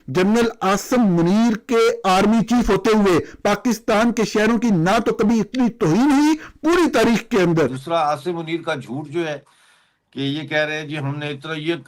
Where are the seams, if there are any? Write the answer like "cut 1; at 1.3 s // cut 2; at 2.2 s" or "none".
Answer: cut 1; at 7.9 s